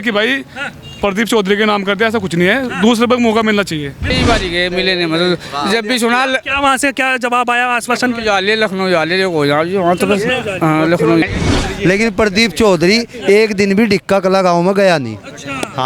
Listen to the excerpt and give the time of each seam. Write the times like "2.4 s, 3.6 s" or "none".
4.1 s, 11.2 s